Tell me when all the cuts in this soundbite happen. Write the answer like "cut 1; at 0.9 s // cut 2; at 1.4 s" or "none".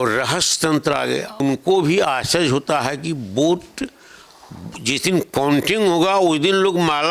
cut 1; at 1.4 s